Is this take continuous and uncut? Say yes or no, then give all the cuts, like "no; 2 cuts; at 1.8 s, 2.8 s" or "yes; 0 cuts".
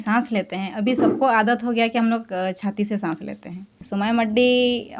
no; 1 cut; at 3.8 s